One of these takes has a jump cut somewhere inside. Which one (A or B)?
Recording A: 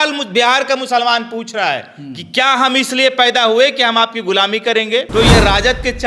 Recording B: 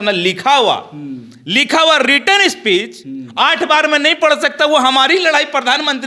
A